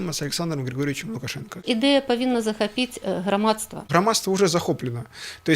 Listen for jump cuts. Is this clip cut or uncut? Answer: cut